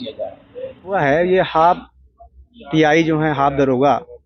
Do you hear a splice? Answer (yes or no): yes